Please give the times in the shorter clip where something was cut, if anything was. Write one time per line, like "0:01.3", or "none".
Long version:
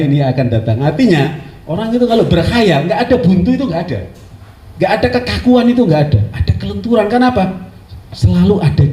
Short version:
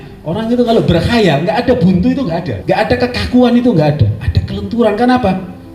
0:02.5

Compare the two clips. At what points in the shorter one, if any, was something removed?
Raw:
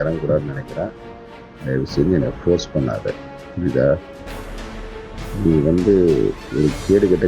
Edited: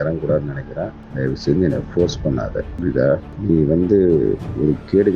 0:01.0
0:02.7
0:03.3

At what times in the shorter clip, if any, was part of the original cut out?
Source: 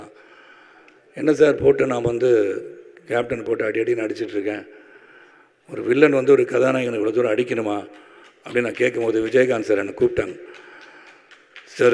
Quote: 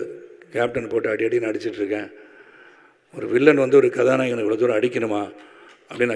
none

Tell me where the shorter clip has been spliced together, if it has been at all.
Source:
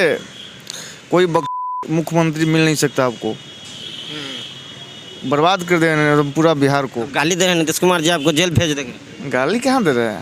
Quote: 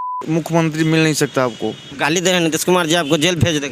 0:01.9

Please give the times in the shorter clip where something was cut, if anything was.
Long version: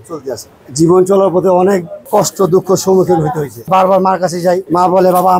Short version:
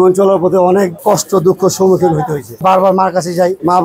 0:01.0

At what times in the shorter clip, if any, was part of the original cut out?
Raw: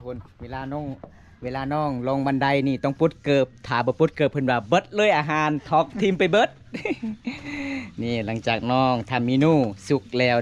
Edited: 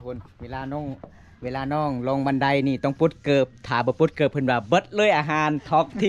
none

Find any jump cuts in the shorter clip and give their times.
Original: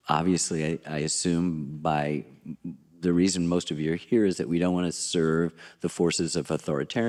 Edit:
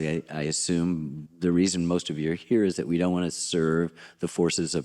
0:01.2

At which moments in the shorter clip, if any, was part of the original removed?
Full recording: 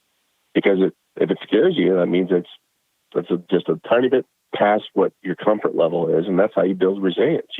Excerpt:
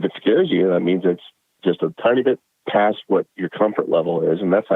0:01.6

